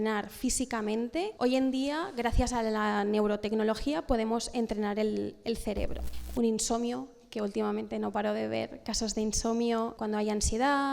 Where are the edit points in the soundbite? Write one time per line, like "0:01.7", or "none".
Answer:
0:01.3
0:06.0
0:10.0